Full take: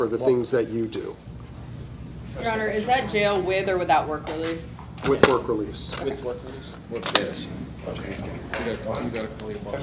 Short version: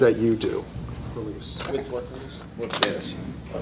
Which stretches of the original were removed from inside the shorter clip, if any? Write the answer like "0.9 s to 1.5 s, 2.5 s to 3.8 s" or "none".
1.9 s to 5.7 s

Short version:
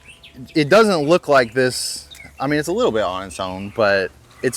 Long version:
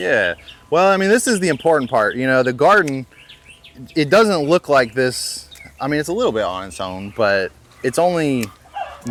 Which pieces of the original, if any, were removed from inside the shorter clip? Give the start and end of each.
none

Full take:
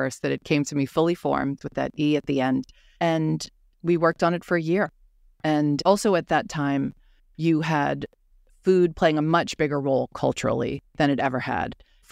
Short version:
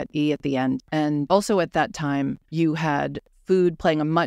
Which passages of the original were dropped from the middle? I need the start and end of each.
2.9 s to 5.6 s, 7.0 s to 7.3 s, 8.1 s to 8.4 s

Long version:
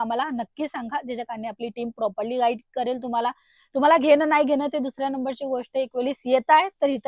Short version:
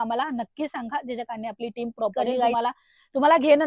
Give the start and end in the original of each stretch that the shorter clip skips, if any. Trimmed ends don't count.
2.5 s to 3.1 s

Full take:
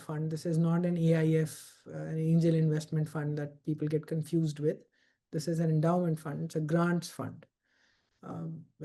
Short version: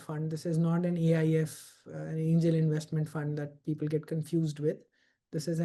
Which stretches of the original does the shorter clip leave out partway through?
none

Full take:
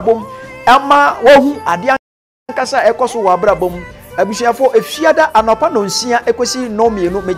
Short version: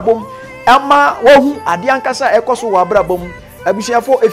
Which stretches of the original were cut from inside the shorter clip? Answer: 2.1 s to 2.6 s

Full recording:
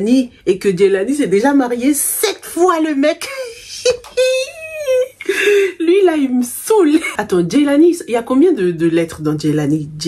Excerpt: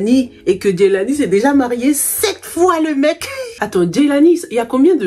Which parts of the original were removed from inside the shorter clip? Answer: 3.6 s to 7.2 s

